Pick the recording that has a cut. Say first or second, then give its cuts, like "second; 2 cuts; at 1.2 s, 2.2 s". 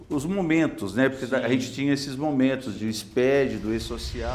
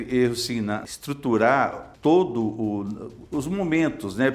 second; 2 cuts; at 0.9 s, 1.8 s